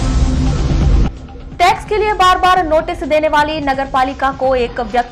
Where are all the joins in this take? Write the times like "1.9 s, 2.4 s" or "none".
0.9 s